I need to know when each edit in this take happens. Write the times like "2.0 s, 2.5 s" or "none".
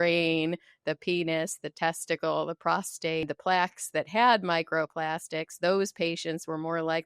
3.2 s

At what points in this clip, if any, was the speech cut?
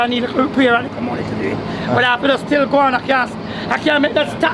none

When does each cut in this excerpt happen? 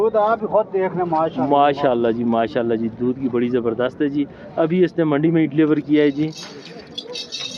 none

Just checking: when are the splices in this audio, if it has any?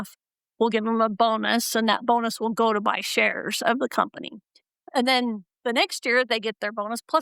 none

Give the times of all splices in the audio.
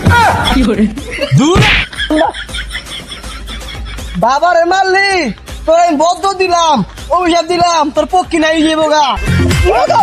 none

